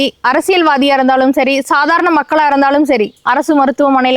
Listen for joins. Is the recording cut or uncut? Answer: uncut